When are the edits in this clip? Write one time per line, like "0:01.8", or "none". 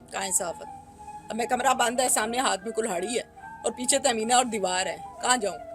none